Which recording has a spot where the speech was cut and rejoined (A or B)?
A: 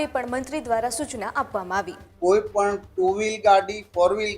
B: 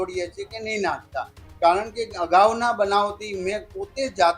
A